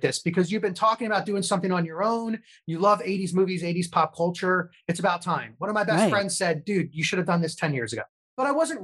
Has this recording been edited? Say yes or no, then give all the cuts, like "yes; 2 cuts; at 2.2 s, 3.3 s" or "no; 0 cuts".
no; 0 cuts